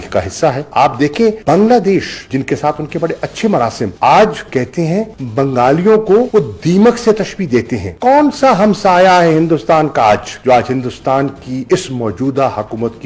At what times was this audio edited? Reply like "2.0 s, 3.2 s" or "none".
none